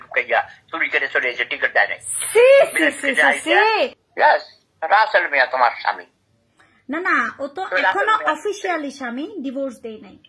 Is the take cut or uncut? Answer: cut